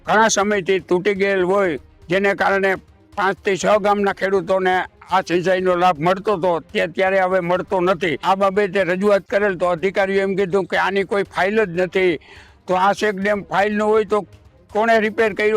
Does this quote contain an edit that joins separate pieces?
yes; 1 cut; at 8.2 s

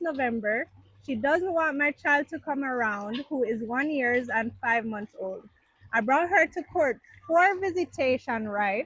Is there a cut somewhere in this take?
no; 0 cuts

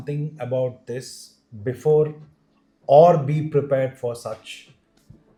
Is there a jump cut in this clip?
no; 0 cuts

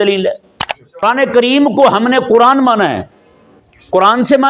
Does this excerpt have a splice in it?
yes; 1 cut; at 1.0 s

